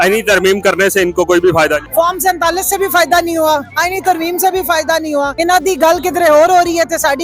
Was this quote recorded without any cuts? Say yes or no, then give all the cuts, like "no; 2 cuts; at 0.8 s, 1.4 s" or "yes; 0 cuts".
no; 3 cuts; at 1.9 s, 3.7 s, 5.3 s